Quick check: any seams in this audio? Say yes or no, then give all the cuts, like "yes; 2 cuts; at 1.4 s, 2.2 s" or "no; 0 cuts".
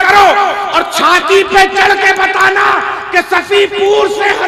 no; 0 cuts